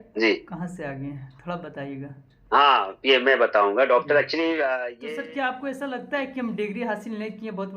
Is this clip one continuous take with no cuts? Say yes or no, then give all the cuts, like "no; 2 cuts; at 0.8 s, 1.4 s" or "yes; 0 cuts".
no; 1 cut; at 4.9 s